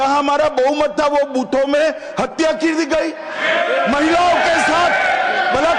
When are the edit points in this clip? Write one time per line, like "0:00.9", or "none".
none